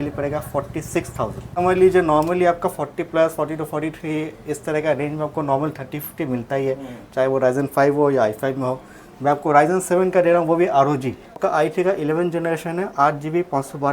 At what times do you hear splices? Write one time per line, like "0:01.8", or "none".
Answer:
0:01.6
0:11.4